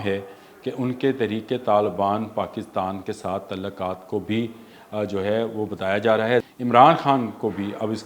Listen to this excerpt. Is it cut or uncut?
cut